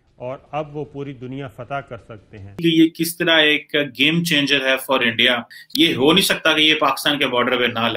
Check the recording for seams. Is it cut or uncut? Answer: cut